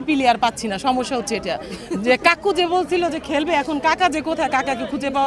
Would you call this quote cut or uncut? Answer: uncut